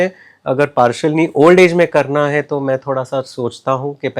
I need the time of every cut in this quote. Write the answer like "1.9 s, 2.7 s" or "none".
none